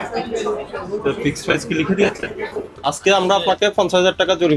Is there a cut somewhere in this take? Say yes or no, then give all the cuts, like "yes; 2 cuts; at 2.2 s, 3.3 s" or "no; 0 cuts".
yes; 1 cut; at 2.8 s